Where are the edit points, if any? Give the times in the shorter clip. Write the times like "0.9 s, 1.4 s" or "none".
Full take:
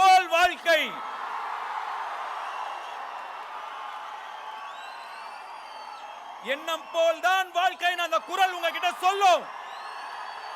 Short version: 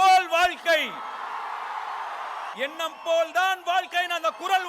2.5 s

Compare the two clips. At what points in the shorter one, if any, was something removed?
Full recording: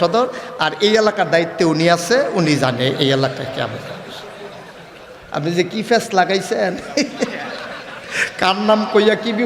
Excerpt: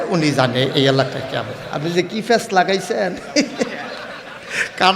1.6 s

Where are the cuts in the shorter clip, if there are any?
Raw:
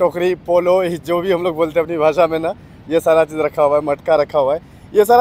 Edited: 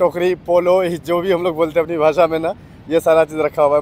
none

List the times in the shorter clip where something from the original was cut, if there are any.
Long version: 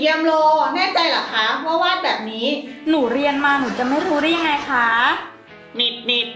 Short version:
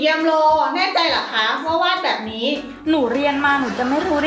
none

